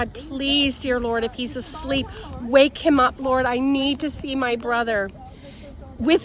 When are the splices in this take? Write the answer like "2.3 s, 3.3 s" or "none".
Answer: none